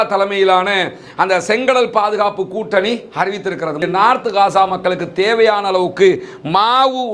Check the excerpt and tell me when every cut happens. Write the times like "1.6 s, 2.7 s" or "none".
3.8 s